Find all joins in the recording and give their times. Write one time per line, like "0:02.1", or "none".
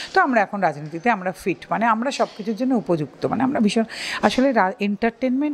none